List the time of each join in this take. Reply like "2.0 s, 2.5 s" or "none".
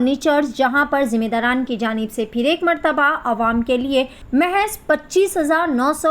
4.2 s